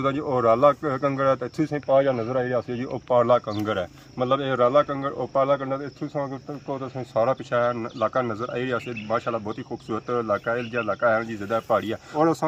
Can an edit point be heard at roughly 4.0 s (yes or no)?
no